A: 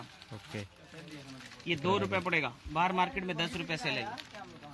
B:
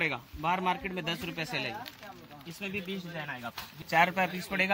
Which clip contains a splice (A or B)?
B